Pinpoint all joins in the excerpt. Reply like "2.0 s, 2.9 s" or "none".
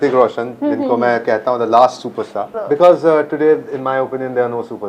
2.5 s